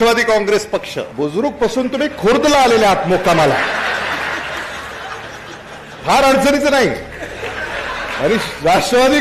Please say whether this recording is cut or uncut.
cut